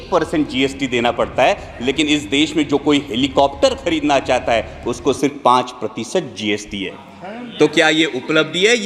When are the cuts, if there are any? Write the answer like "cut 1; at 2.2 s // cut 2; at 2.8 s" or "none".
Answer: none